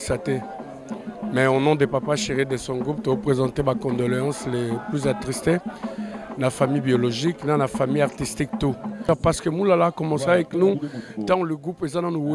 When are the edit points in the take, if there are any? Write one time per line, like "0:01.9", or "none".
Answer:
0:09.1